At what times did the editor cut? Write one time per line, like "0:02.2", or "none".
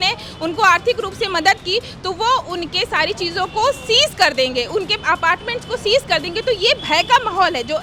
none